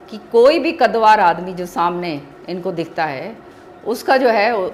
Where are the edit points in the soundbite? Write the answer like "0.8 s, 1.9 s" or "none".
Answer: none